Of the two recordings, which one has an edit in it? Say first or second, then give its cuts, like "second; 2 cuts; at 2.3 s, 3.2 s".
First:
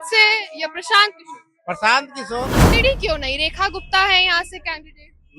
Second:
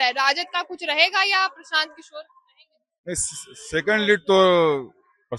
first; 1 cut; at 2.6 s